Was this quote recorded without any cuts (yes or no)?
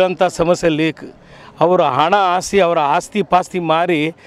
yes